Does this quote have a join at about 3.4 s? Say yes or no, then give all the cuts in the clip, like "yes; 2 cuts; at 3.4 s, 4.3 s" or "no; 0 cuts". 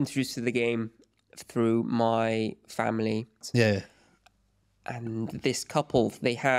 yes; 1 cut; at 3.4 s